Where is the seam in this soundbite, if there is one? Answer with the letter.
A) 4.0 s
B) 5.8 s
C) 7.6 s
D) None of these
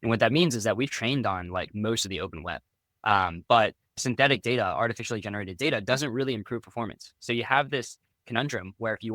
A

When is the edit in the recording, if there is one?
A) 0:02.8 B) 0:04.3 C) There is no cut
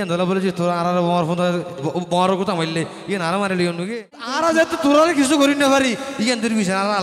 B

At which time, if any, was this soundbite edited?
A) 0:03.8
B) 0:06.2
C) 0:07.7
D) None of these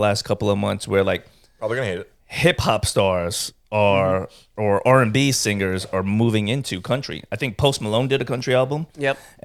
D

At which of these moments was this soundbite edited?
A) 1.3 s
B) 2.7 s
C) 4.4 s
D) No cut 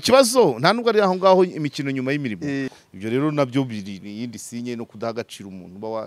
B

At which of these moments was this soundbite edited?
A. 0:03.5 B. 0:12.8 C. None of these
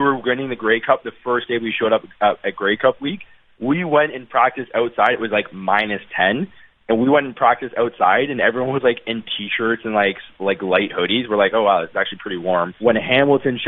B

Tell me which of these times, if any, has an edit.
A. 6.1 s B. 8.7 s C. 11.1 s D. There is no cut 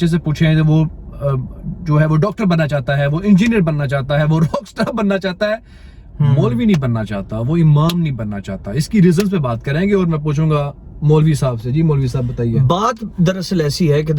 D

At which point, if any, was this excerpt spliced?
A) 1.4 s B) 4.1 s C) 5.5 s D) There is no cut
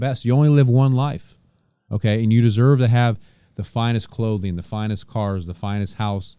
D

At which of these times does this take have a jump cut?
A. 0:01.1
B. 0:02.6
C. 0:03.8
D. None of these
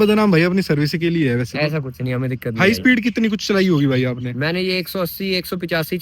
B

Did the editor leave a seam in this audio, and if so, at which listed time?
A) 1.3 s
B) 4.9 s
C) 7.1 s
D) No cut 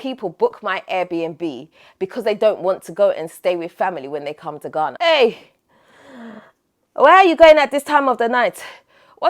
B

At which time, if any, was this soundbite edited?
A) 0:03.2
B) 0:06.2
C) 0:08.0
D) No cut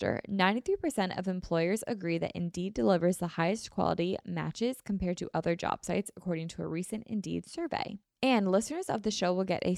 C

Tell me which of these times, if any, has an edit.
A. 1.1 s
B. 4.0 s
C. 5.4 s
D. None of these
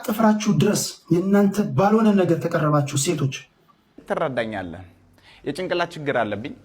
B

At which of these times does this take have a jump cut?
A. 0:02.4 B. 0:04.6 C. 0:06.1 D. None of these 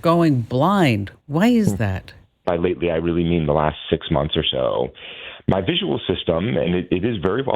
A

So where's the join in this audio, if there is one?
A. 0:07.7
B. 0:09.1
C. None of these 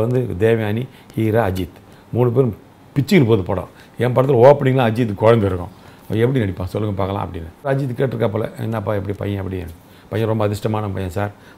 A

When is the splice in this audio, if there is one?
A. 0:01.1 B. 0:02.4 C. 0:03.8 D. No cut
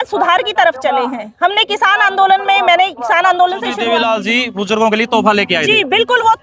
C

